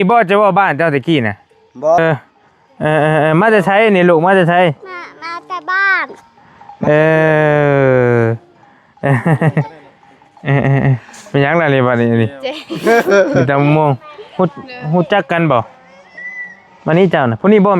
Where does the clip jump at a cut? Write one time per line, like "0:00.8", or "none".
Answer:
0:02.0

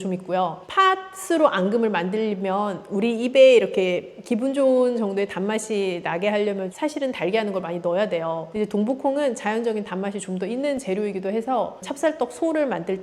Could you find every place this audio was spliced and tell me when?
0:11.8

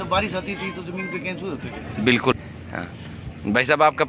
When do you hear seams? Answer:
0:02.3

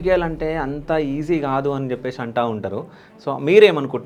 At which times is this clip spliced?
none

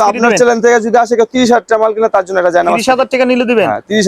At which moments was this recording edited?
none

